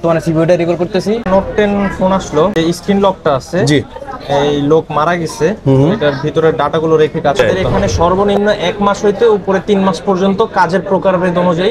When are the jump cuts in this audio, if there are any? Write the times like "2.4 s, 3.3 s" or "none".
1.2 s, 2.5 s, 7.4 s